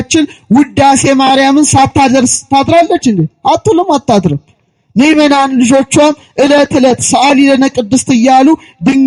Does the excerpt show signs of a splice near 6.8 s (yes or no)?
no